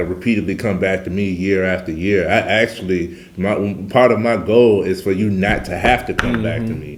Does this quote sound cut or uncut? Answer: uncut